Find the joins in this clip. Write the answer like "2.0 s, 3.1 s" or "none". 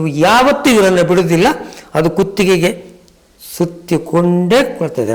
none